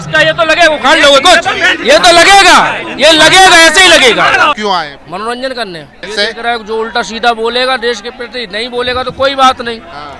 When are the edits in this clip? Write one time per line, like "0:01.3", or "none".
0:04.6
0:06.0